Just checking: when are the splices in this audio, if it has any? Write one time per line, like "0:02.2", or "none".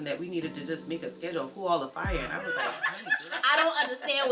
0:02.8